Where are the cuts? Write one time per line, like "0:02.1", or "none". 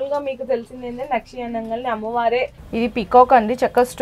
0:02.6